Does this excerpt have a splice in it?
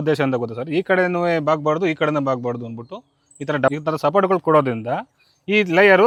no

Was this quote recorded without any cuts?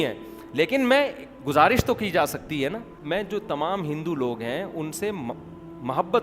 no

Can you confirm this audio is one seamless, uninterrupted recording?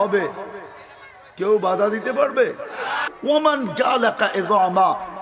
no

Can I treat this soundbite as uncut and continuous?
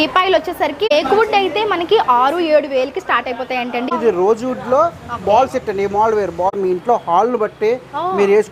no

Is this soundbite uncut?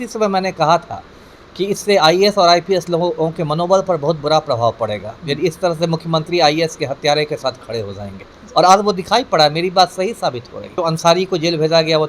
no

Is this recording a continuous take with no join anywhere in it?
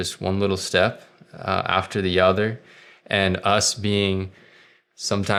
yes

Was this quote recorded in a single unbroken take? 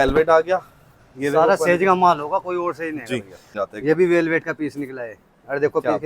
no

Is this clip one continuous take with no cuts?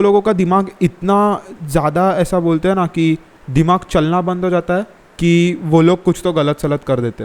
no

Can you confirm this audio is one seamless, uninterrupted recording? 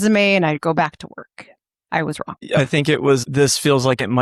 no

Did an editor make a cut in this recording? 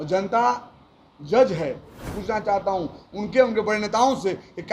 yes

